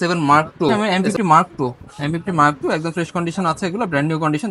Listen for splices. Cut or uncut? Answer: cut